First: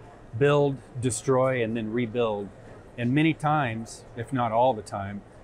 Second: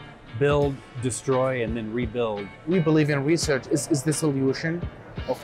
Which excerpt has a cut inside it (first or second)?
second